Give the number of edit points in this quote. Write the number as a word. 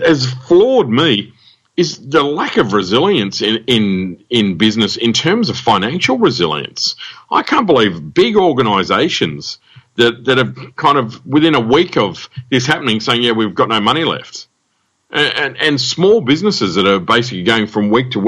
one